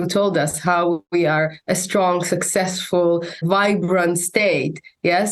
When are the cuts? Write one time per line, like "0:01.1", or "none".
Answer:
0:03.4